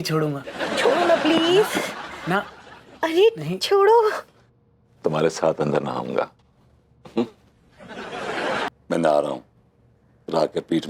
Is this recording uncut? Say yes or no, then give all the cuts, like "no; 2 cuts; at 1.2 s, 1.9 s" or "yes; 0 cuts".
no; 1 cut; at 8.7 s